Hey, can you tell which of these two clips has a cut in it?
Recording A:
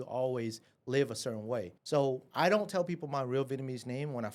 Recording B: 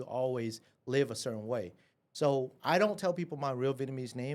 A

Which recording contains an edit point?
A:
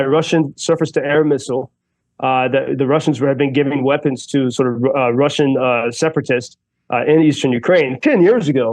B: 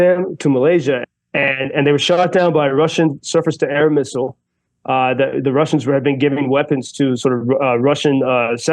B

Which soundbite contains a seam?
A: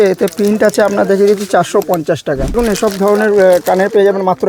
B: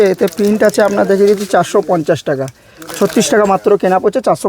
A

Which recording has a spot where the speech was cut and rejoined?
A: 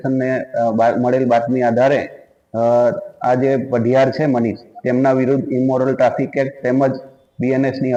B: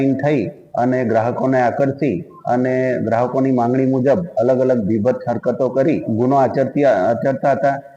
B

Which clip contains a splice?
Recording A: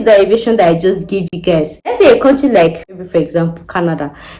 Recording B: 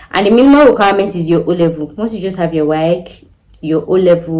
A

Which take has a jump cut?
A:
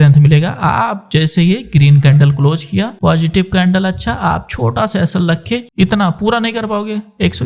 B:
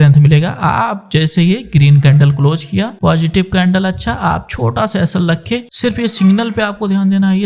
B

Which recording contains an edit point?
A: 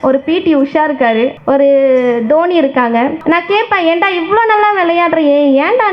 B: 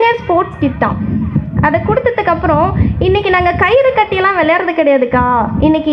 A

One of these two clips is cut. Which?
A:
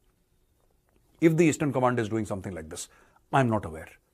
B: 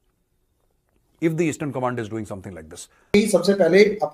B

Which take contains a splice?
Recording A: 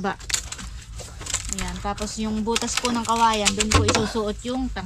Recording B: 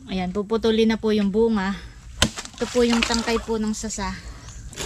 B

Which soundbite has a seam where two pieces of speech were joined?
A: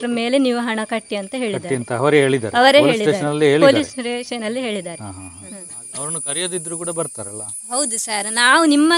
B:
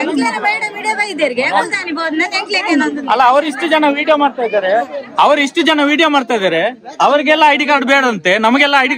A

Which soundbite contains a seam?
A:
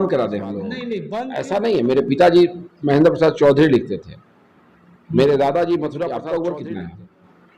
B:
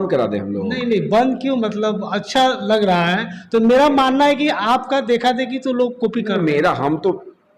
A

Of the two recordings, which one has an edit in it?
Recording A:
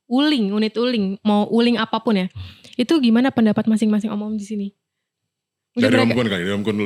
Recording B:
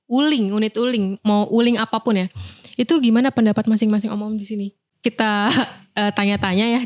B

